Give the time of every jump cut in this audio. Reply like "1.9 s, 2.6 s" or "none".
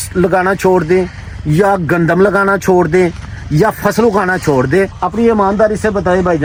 none